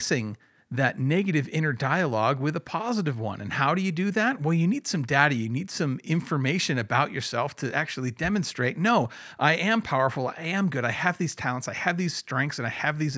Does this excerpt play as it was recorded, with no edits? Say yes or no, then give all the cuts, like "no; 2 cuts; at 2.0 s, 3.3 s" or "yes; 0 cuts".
yes; 0 cuts